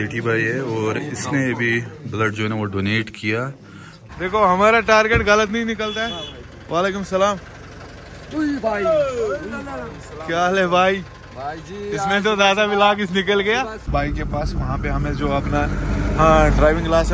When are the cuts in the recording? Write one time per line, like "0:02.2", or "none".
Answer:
0:04.1
0:13.9